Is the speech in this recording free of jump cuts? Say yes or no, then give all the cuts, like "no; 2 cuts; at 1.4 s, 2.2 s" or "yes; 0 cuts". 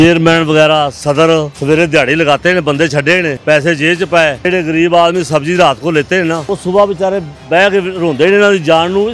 no; 4 cuts; at 1.5 s, 3.4 s, 4.4 s, 6.5 s